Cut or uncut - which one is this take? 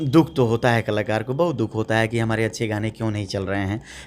uncut